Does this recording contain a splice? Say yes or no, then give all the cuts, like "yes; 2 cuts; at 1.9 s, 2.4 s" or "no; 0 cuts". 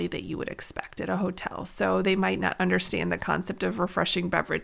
no; 0 cuts